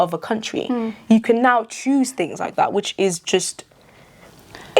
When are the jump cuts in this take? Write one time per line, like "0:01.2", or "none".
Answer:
none